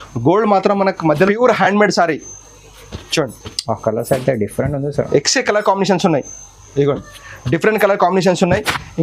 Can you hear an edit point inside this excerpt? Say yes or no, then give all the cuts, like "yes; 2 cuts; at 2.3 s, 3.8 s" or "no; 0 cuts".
yes; 1 cut; at 1.3 s